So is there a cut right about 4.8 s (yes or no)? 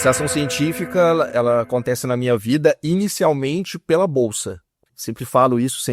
yes